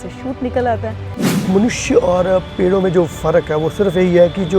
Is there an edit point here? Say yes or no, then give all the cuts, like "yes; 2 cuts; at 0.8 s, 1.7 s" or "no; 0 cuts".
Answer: yes; 1 cut; at 1.4 s